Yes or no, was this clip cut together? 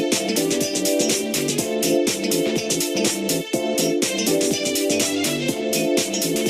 no